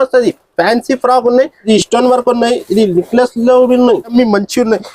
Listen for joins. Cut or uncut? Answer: cut